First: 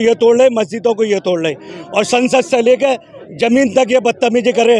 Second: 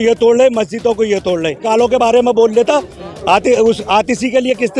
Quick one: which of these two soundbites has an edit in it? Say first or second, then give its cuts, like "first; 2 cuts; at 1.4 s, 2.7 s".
second; 1 cut; at 1.7 s